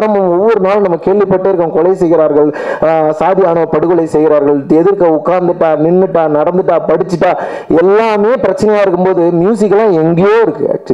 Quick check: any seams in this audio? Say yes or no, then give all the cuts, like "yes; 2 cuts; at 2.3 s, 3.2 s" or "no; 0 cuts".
no; 0 cuts